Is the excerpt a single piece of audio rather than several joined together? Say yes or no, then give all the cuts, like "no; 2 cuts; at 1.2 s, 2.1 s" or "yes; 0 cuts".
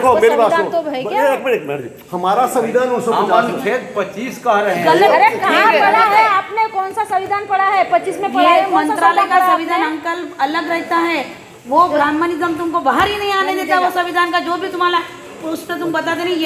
yes; 0 cuts